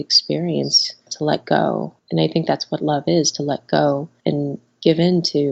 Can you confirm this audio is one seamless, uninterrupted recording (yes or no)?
no